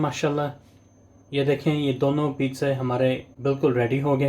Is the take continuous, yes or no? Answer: no